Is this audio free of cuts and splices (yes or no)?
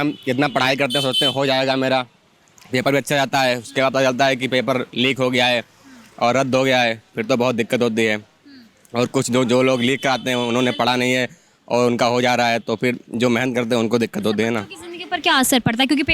yes